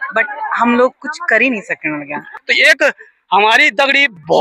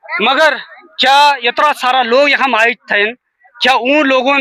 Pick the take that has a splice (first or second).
first